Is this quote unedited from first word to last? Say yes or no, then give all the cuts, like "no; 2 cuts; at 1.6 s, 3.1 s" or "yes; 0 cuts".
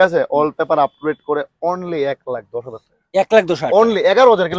yes; 0 cuts